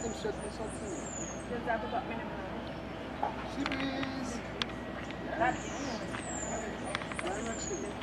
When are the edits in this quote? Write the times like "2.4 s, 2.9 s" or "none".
0.9 s

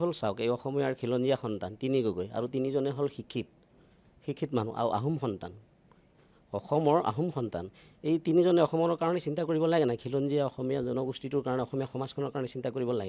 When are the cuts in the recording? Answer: none

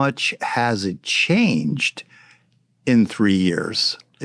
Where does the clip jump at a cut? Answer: none

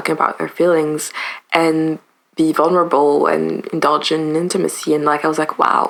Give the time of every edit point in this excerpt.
none

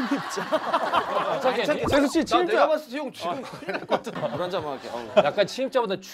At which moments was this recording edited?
1.3 s, 4.1 s

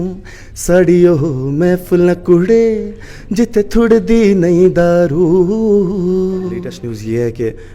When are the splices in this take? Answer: 6.7 s

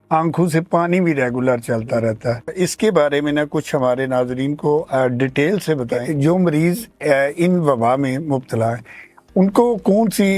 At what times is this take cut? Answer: 2.5 s, 6.0 s

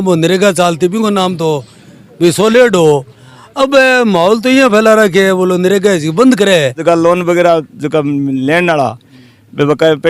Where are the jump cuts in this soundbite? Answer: 6.8 s

